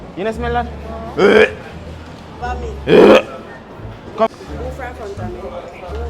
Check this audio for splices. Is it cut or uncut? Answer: cut